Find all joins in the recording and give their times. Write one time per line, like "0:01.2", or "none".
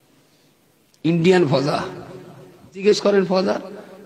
0:02.8